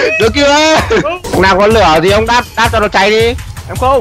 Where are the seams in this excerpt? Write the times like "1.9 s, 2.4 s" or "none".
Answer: 1.2 s